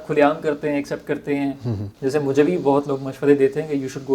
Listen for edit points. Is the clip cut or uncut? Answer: cut